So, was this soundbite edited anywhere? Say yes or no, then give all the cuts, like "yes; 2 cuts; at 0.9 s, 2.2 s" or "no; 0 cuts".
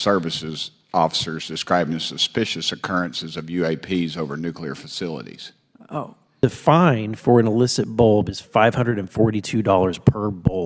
yes; 1 cut; at 6.4 s